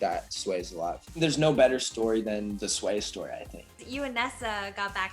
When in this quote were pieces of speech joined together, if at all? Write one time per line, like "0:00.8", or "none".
0:01.2
0:02.6
0:03.7